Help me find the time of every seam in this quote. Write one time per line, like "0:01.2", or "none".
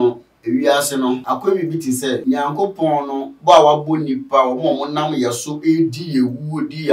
0:01.2
0:02.2